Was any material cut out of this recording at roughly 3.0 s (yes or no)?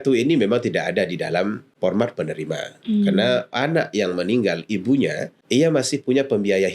no